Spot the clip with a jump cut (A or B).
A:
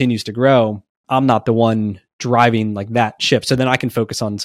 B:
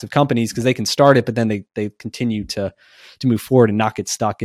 A